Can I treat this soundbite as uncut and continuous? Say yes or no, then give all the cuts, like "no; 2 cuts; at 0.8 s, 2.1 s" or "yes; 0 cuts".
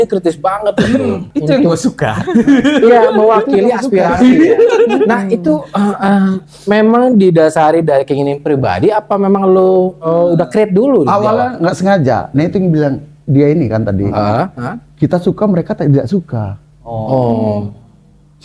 no; 1 cut; at 1.3 s